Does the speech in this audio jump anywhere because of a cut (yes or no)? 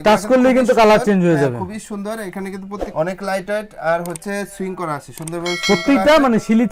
no